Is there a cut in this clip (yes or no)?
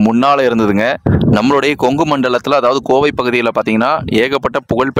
yes